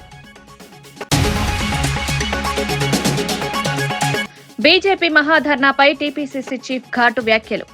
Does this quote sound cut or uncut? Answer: cut